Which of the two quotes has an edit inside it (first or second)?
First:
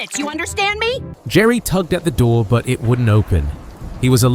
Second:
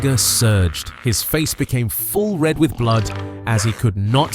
first